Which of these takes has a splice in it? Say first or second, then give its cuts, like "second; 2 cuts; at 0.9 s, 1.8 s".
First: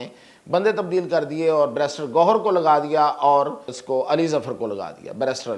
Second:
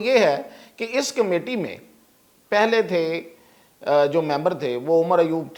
first; 1 cut; at 3.8 s